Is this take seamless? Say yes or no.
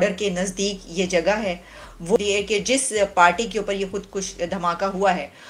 yes